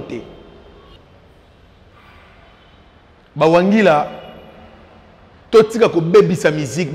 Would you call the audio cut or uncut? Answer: cut